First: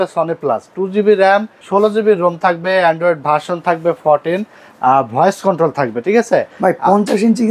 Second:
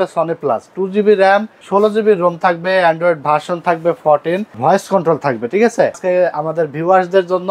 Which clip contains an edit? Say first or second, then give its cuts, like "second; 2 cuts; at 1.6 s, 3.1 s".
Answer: second; 2 cuts; at 4.6 s, 6.0 s